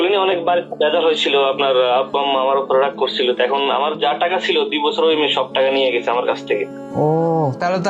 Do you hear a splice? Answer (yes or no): no